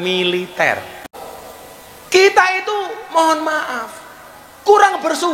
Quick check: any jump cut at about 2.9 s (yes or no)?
no